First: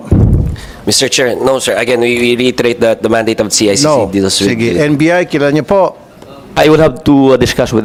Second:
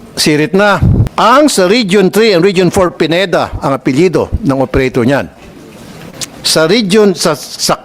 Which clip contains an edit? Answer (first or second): second